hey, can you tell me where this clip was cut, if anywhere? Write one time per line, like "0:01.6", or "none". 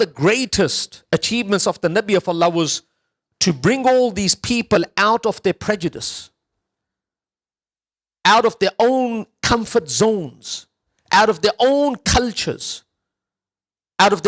none